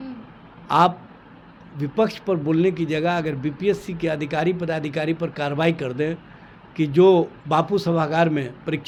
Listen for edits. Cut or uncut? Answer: uncut